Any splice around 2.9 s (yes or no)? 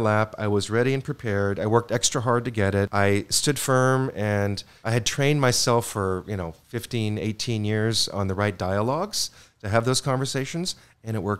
yes